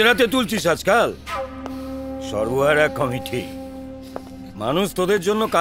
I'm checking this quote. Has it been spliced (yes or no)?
no